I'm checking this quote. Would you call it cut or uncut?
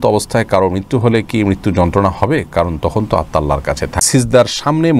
cut